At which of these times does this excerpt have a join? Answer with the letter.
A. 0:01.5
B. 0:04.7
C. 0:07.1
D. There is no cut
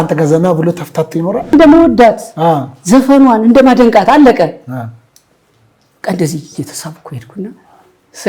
A